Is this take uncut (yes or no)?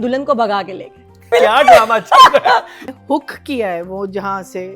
no